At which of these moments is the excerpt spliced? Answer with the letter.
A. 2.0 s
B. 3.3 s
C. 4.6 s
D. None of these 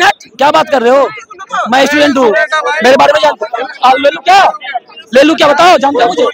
D